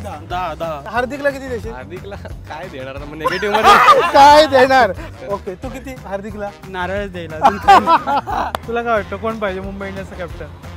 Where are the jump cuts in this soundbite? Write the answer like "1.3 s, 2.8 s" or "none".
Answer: 0.9 s, 5.0 s, 8.6 s